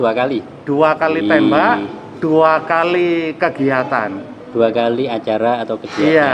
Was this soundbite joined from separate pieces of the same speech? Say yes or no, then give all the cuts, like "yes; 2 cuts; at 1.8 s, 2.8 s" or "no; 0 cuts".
no; 0 cuts